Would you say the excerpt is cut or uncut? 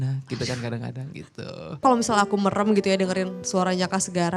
cut